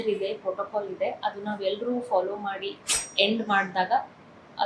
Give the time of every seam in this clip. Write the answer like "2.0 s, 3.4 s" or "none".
3.0 s